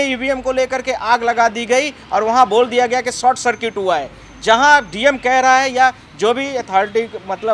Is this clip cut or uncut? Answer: uncut